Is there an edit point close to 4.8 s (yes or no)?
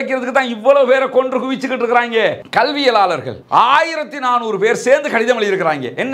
no